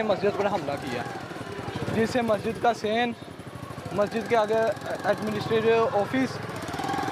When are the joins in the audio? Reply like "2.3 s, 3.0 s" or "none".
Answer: none